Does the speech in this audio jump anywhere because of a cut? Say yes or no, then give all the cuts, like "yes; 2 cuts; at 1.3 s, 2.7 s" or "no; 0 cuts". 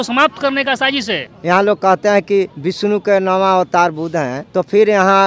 yes; 3 cuts; at 1.3 s, 2.6 s, 4.4 s